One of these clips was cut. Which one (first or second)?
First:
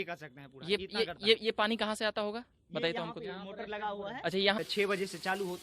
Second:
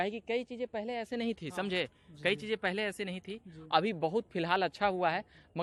first